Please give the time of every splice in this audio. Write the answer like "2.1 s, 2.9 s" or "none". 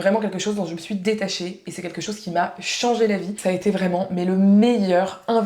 3.4 s